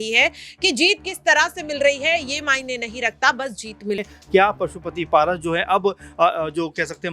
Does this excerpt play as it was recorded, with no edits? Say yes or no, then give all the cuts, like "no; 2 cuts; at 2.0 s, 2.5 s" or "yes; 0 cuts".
no; 1 cut; at 4.1 s